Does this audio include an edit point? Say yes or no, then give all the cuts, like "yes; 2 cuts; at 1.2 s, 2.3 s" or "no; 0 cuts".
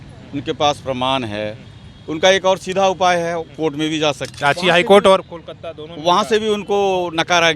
yes; 1 cut; at 4.3 s